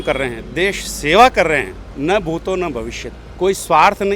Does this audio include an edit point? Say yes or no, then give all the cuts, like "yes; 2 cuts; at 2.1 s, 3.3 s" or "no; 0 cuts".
no; 0 cuts